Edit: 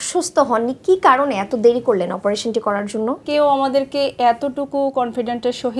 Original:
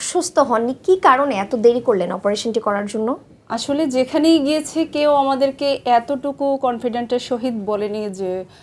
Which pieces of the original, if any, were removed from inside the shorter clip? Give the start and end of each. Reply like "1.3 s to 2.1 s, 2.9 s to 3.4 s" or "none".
3.2 s to 4.9 s